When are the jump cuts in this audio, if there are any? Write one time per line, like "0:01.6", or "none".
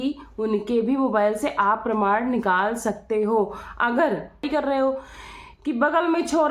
0:04.5